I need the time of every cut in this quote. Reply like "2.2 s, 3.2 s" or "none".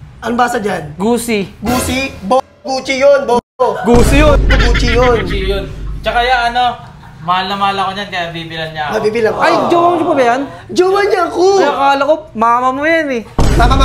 none